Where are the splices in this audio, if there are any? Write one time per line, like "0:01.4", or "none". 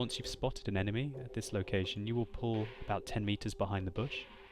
0:02.8